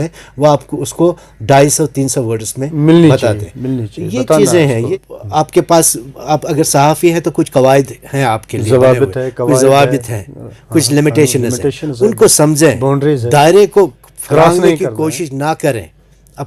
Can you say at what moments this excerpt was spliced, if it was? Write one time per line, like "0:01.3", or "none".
0:04.8